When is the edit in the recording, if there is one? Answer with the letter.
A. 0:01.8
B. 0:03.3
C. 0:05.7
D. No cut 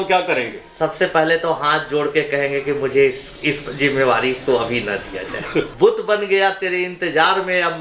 C